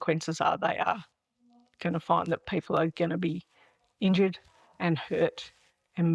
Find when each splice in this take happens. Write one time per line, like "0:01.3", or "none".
none